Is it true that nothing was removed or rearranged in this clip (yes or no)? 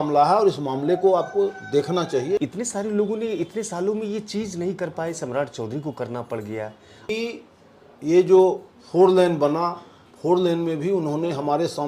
no